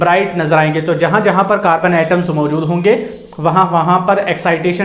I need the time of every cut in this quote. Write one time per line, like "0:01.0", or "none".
none